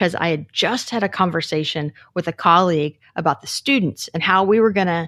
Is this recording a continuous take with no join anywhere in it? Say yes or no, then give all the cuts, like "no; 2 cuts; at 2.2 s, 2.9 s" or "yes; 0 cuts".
yes; 0 cuts